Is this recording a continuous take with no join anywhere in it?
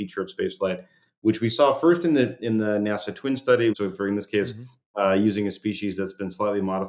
no; 1 cut; at 3.7 s

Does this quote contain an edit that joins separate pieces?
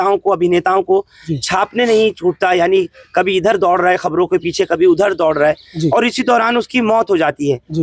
no; 0 cuts

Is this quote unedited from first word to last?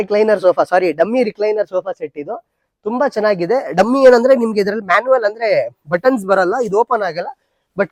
yes; 0 cuts

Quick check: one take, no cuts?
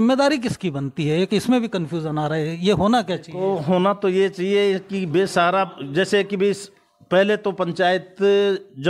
yes; 0 cuts

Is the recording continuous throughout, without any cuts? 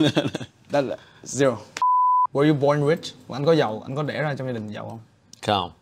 no; 1 cut; at 1.7 s

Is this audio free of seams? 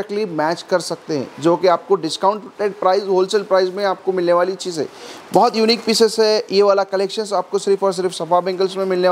yes; 0 cuts

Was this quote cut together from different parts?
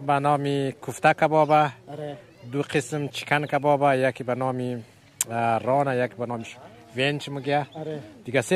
no; 0 cuts

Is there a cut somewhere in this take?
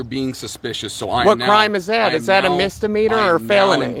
no; 0 cuts

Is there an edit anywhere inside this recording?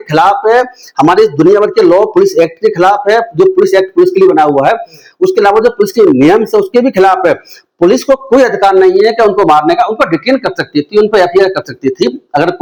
no; 0 cuts

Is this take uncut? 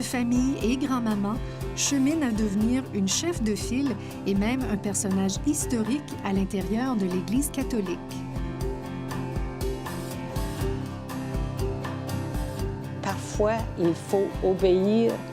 no; 1 cut; at 2.6 s

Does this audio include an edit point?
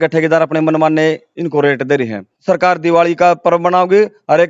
yes; 1 cut; at 2.3 s

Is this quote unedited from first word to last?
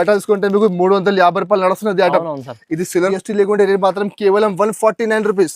no; 1 cut; at 3.1 s

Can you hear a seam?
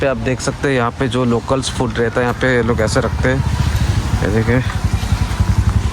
no; 0 cuts

